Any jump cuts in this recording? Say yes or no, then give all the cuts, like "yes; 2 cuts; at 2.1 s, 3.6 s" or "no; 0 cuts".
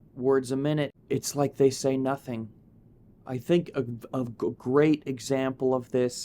yes; 1 cut; at 0.9 s